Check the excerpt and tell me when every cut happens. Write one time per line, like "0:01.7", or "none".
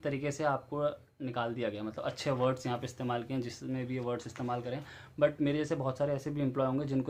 none